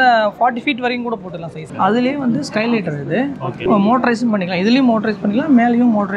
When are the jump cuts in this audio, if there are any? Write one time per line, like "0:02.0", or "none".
0:01.7
0:03.7